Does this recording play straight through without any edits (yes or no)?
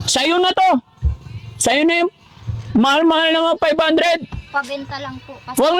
yes